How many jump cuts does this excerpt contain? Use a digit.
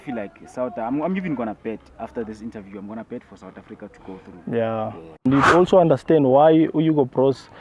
1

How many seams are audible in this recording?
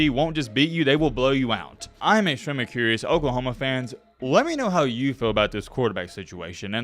1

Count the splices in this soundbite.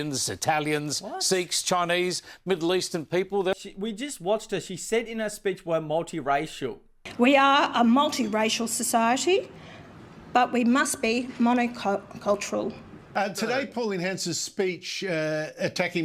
1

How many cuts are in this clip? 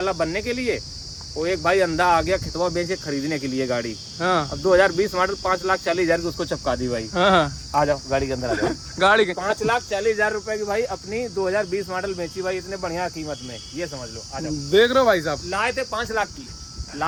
0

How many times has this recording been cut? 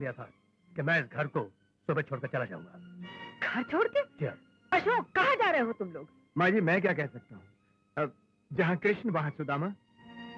0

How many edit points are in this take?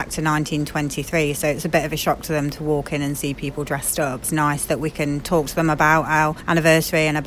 2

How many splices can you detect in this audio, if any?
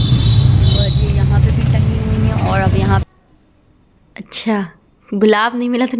1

